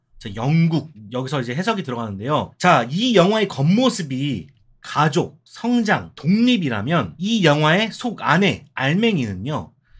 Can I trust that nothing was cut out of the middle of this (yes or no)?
no